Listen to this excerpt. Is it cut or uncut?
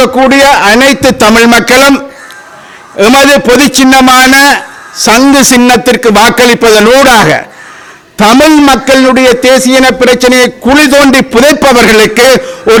uncut